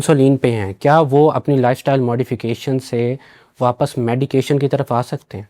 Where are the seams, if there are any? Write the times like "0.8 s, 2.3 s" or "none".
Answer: none